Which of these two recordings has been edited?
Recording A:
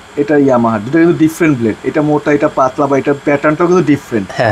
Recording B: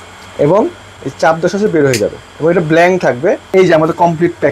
B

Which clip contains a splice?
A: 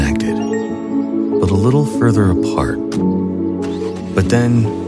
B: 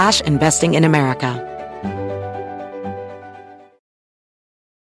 B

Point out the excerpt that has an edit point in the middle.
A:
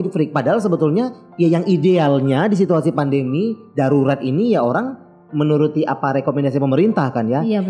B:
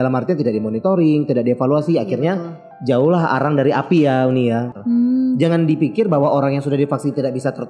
B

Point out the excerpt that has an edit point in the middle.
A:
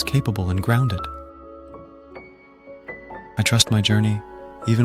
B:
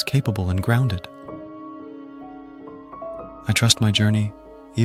A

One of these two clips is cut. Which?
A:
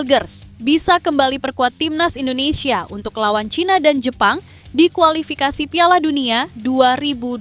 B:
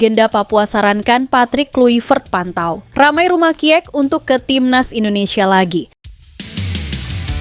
B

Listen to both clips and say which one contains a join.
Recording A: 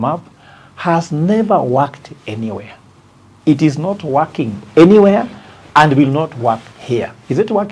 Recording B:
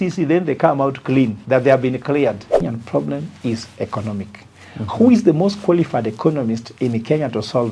B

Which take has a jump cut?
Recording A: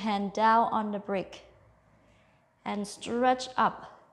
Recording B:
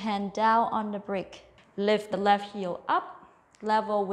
B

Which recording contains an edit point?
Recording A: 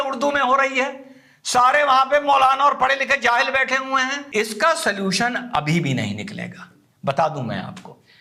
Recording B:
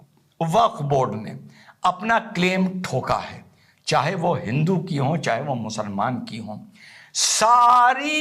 A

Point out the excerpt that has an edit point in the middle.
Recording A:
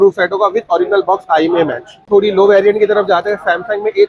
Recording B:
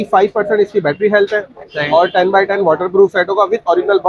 A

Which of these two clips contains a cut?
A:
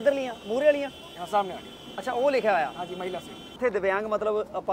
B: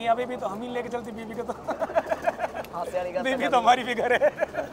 A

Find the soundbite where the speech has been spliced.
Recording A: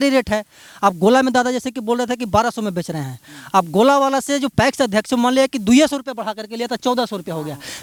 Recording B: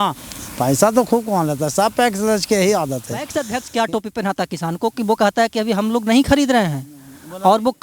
B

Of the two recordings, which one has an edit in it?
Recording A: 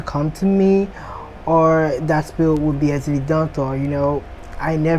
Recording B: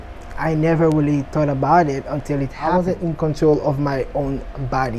B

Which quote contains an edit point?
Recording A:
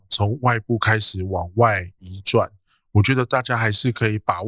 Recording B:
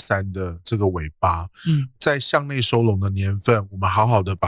B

